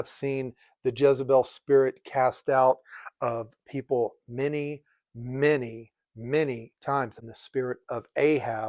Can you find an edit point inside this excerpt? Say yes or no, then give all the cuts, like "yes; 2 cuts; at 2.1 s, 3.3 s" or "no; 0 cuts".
yes; 1 cut; at 7.2 s